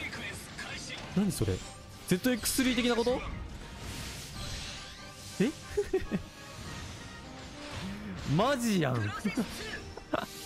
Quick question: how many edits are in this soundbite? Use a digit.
1